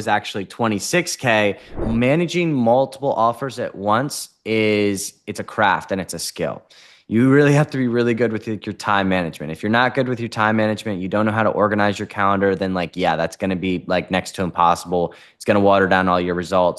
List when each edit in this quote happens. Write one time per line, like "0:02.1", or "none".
0:01.7

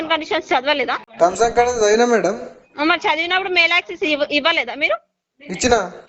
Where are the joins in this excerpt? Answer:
0:01.0

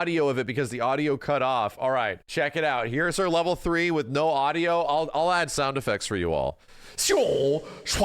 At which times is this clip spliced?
0:02.2

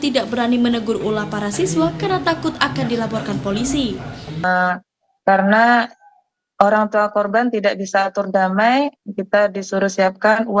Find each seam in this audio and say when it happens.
0:04.4

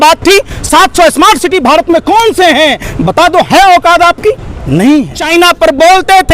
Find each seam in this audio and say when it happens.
0:05.2

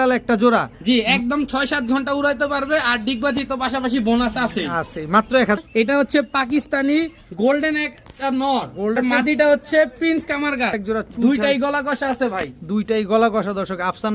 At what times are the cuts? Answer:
0:05.6
0:09.0
0:10.8

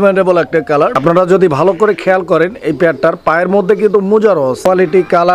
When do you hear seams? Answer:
0:00.9
0:04.3

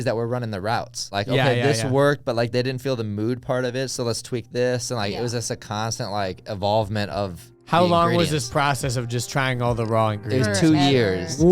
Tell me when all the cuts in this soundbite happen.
0:01.1

